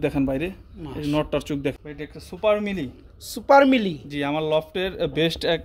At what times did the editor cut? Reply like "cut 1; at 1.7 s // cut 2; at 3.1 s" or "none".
cut 1; at 1.7 s